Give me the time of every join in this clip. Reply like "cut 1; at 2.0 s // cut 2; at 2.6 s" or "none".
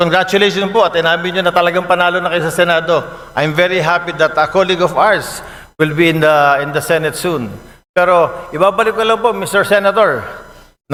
none